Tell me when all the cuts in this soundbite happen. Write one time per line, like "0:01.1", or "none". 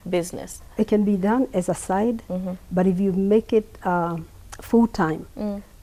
none